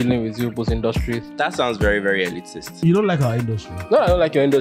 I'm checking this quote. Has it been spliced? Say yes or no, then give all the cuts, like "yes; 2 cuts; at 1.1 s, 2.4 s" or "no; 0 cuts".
yes; 2 cuts; at 1.2 s, 2.8 s